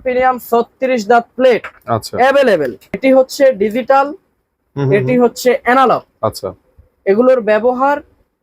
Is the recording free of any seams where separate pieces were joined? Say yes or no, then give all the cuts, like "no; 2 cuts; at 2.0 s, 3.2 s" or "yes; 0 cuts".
no; 1 cut; at 3.0 s